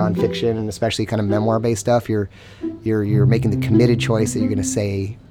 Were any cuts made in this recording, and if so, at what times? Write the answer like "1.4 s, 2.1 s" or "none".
none